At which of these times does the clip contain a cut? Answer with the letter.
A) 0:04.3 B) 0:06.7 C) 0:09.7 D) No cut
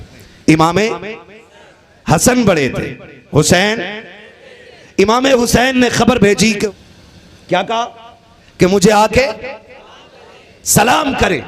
B